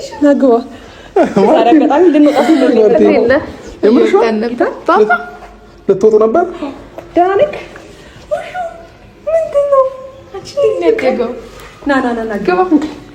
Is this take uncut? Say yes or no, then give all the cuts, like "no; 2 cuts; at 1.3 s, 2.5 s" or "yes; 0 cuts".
yes; 0 cuts